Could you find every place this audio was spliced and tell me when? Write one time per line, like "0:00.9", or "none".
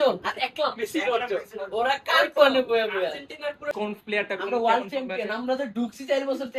0:03.7